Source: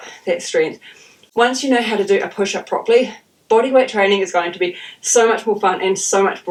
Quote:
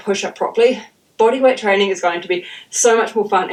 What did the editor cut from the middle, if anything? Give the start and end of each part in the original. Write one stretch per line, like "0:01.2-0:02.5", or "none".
none